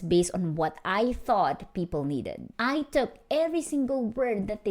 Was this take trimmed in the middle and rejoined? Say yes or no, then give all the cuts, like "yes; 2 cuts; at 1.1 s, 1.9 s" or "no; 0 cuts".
yes; 1 cut; at 2.5 s